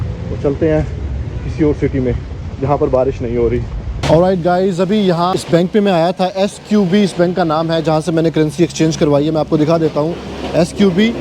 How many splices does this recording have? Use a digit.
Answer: 1